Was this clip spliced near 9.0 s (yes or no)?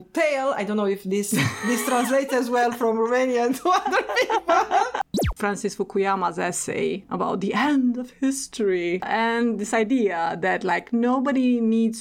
yes